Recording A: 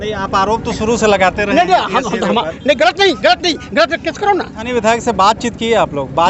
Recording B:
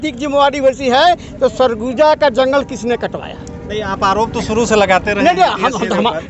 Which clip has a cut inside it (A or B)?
A